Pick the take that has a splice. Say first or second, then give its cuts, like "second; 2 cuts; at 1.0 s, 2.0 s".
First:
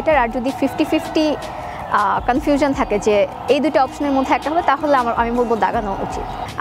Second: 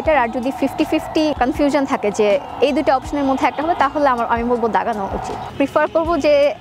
second; 2 cuts; at 1.4 s, 5.5 s